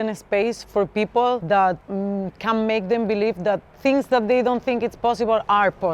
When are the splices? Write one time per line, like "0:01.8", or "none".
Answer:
0:01.4